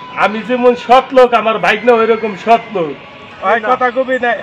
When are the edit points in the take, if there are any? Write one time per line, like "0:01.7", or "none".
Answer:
0:03.2